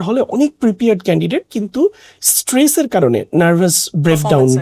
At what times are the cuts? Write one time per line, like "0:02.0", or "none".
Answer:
none